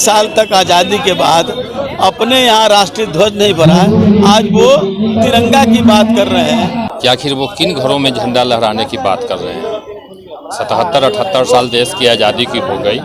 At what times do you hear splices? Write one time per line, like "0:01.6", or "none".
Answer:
0:06.9